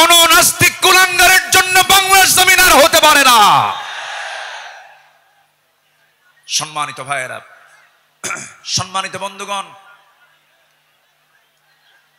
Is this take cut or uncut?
uncut